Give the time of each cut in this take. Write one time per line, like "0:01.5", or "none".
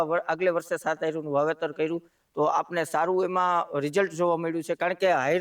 0:02.2